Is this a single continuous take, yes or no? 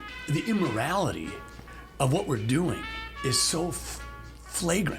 no